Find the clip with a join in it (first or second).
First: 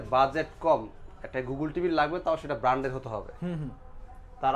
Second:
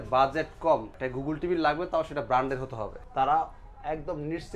second